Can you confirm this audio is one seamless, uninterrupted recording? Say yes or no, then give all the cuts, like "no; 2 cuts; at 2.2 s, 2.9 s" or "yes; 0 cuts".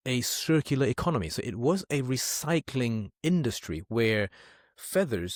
yes; 0 cuts